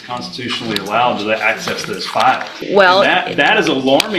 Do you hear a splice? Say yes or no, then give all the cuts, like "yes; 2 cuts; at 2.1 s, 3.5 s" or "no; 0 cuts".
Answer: yes; 1 cut; at 2.5 s